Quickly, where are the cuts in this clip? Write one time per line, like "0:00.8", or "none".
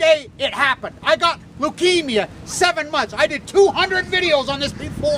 0:02.2